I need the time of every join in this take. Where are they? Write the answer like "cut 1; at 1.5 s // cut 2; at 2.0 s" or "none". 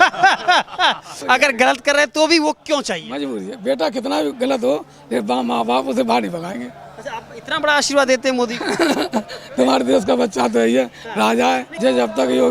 cut 1; at 1.1 s // cut 2; at 11.7 s